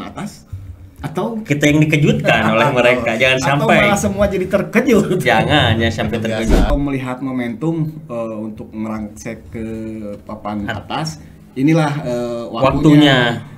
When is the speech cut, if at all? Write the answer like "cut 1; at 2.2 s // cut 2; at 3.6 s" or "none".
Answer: cut 1; at 6.7 s